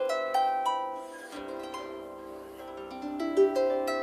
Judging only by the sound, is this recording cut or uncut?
uncut